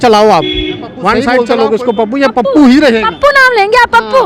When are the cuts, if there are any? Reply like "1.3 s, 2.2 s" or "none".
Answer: 1.2 s